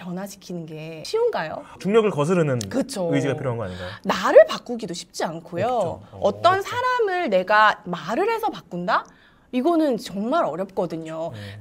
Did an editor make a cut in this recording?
no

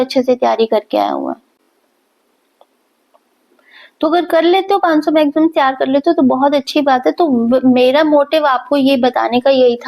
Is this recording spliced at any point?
no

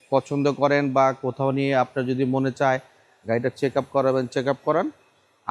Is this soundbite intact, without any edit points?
yes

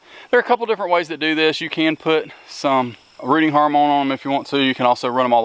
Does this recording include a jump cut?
yes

